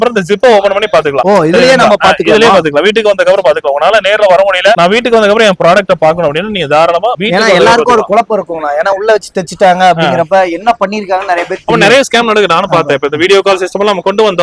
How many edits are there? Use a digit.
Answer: 0